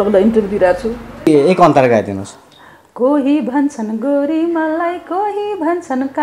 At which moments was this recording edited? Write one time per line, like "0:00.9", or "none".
0:01.3